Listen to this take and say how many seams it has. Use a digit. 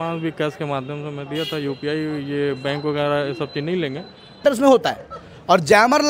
1